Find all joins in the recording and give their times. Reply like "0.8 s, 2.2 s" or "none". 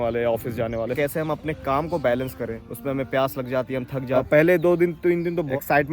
0.9 s, 4.2 s

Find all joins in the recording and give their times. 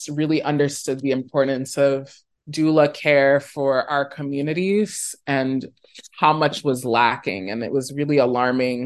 none

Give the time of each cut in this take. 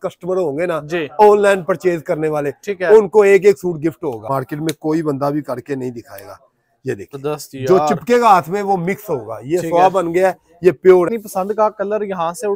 4.3 s, 7.2 s, 11.2 s

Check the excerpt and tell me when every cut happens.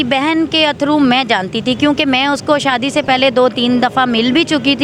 none

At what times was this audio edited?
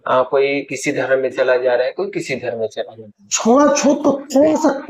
3.3 s

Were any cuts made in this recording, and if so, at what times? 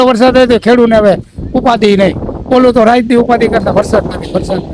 none

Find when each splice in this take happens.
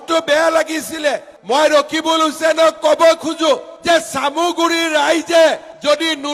1.3 s

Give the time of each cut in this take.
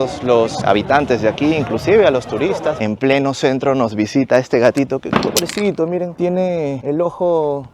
2.8 s

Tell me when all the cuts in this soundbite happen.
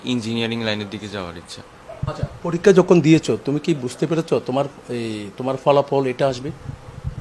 none

